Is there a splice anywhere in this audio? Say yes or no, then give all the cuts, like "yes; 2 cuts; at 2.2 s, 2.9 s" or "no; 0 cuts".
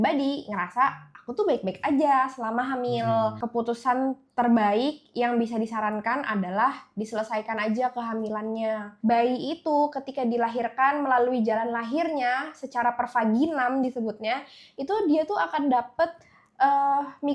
yes; 2 cuts; at 3.4 s, 8.9 s